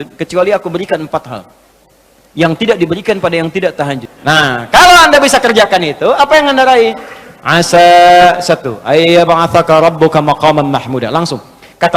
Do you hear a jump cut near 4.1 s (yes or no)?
yes